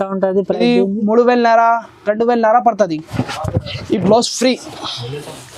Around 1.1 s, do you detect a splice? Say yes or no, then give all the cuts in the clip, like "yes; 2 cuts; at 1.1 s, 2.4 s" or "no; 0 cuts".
no; 1 cut; at 3.1 s